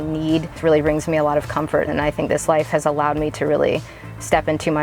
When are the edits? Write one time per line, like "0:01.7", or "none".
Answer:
0:02.1